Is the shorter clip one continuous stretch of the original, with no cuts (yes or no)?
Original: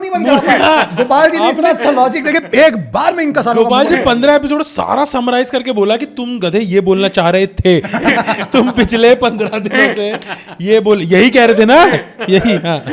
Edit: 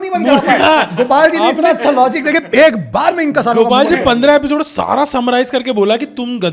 yes